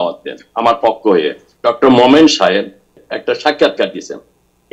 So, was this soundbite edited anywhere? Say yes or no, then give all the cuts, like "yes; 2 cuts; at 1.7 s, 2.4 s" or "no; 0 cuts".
yes; 2 cuts; at 1.4 s, 3.0 s